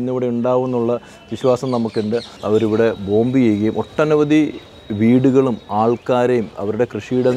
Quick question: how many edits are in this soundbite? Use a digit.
1